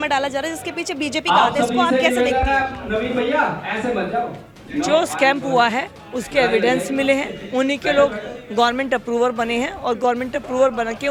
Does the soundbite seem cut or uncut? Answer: uncut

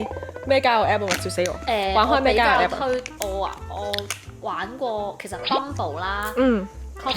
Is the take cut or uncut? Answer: uncut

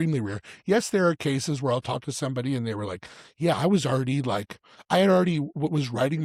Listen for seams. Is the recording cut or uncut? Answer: uncut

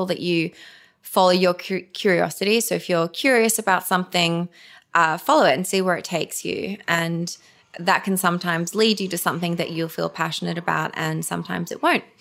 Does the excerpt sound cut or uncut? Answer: uncut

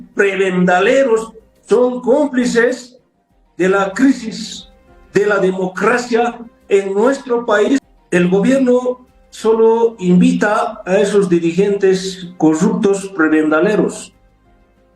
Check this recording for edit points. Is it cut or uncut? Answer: cut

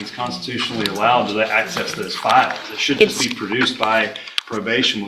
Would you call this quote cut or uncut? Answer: uncut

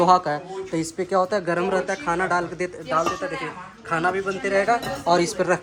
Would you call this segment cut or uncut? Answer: uncut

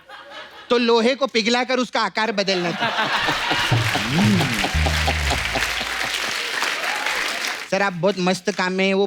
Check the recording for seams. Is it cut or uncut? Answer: cut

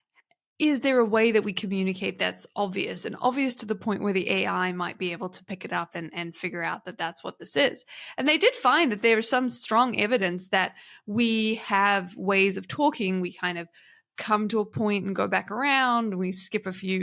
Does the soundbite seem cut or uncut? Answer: uncut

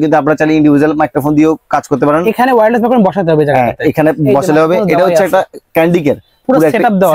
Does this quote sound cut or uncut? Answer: uncut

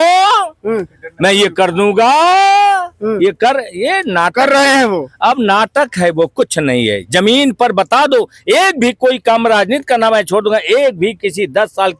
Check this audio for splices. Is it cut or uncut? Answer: uncut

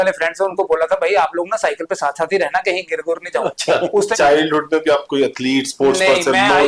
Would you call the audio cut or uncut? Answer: cut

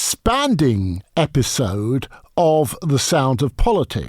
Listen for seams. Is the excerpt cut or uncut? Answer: cut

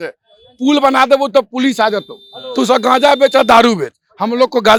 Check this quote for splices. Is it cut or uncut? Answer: uncut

